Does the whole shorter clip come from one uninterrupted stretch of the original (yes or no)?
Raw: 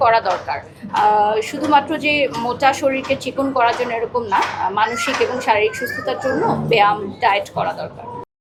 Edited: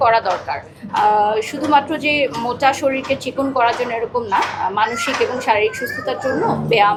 yes